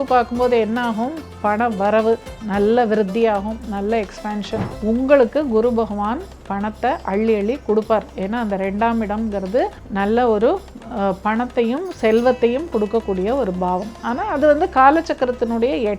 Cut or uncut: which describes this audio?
cut